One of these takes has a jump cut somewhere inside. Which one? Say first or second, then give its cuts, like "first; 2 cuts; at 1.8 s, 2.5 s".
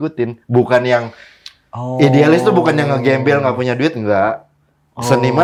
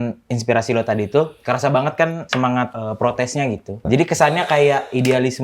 second; 2 cuts; at 2.3 s, 3.9 s